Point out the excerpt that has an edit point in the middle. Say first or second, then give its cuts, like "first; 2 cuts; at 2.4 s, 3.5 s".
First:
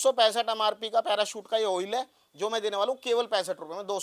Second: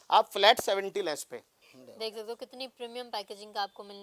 second; 1 cut; at 1.5 s